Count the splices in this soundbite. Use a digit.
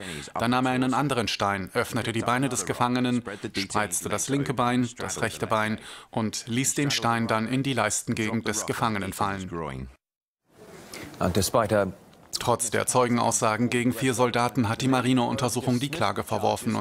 1